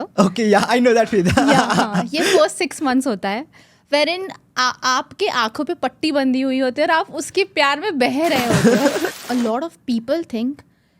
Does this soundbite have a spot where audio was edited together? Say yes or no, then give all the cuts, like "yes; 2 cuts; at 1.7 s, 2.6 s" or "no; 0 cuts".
yes; 1 cut; at 9.1 s